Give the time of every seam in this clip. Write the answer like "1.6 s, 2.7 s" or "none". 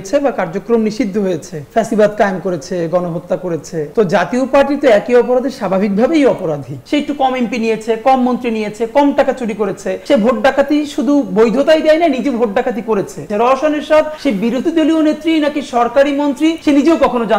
3.9 s, 6.7 s, 10.0 s, 13.3 s